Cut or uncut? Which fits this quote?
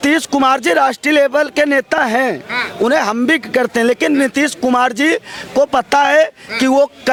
uncut